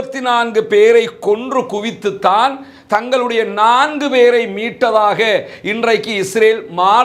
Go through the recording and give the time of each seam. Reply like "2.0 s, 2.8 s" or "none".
none